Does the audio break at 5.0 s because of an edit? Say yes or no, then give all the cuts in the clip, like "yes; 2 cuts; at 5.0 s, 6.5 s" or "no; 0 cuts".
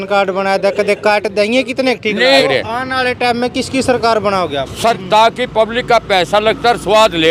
yes; 2 cuts; at 2.4 s, 5.0 s